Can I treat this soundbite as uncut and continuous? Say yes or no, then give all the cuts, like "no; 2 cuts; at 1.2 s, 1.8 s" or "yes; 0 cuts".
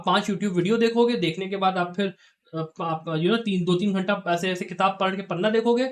yes; 0 cuts